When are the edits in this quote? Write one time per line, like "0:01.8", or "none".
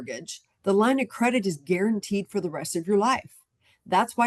none